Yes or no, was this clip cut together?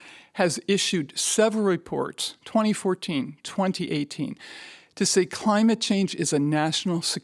no